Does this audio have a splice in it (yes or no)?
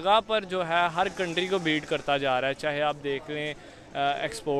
no